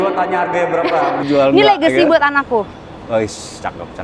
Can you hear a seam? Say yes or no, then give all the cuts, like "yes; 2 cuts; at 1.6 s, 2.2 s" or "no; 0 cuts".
no; 0 cuts